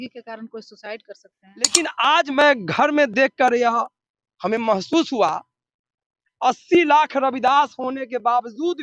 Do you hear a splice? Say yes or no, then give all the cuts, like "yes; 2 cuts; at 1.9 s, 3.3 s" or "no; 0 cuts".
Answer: yes; 1 cut; at 1.7 s